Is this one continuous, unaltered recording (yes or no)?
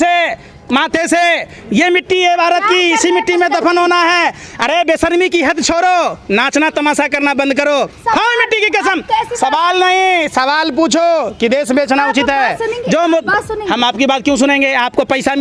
yes